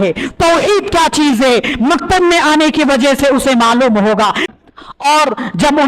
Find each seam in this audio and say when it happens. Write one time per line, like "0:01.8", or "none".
0:04.4